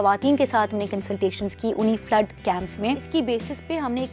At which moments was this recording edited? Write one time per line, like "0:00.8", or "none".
0:03.0